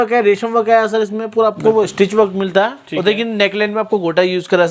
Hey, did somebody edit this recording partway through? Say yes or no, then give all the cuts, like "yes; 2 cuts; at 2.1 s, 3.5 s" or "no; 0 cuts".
no; 0 cuts